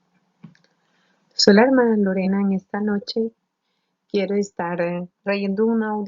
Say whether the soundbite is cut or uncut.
cut